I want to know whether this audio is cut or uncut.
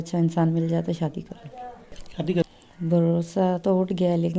cut